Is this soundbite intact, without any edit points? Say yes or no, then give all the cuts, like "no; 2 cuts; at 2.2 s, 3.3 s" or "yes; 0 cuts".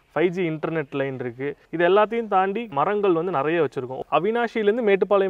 no; 3 cuts; at 1.6 s, 2.7 s, 4.0 s